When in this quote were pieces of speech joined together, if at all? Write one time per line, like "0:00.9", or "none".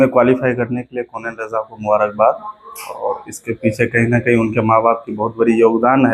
none

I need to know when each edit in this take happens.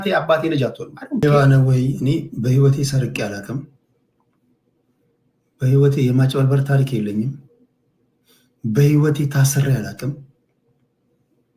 0:01.4

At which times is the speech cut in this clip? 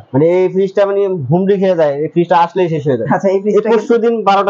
none

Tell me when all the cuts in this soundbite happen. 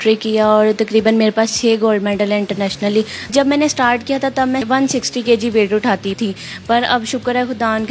0:03.3
0:04.6
0:06.1

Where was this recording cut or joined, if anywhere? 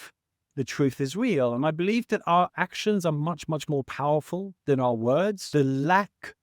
0:05.4

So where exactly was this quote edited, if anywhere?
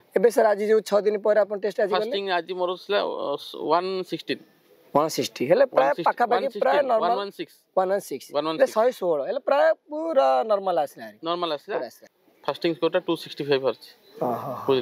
0:12.0

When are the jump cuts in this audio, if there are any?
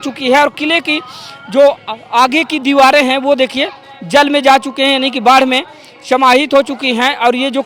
none

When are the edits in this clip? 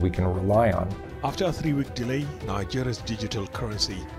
0:01.0

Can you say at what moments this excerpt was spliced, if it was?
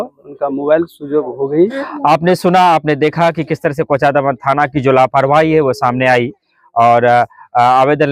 0:01.9

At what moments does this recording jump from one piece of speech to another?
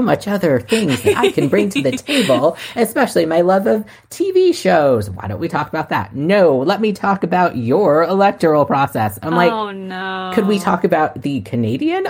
none

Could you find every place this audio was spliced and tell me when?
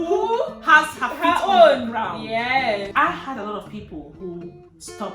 0:02.9

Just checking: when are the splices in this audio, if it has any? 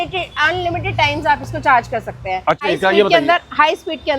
0:02.6

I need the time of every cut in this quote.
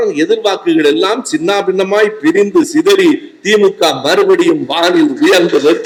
none

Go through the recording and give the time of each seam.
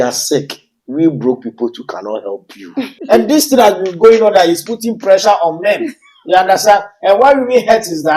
0:03.0

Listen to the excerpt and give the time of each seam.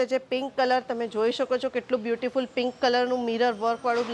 none

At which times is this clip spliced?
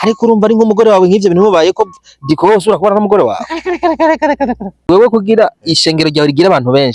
0:04.8

